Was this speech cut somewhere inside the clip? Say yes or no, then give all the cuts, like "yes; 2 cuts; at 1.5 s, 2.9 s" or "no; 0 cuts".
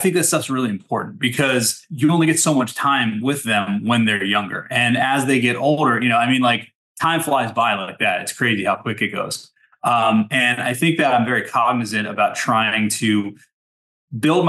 no; 0 cuts